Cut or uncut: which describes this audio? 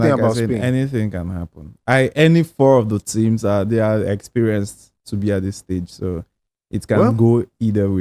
uncut